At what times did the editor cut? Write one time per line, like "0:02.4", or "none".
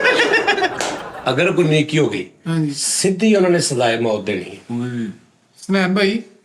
0:01.0